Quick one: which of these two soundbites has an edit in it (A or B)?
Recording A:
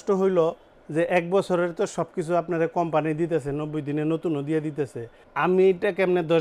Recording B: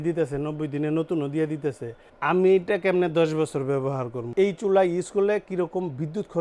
B